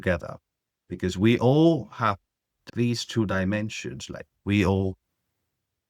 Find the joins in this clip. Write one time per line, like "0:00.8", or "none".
0:02.6